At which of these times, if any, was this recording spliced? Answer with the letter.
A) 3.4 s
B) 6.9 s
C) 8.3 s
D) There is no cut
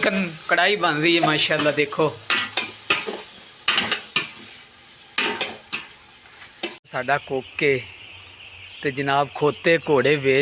B